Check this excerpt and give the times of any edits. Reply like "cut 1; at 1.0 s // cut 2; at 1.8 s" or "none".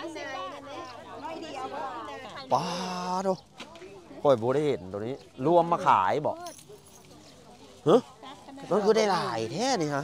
cut 1; at 2.3 s